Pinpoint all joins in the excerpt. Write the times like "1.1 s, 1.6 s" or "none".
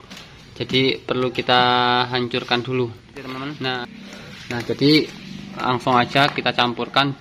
3.6 s